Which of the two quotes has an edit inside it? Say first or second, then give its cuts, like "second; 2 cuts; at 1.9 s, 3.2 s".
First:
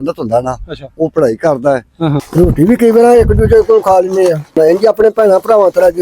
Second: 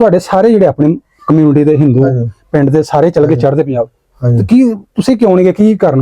first; 2 cuts; at 2.3 s, 4.5 s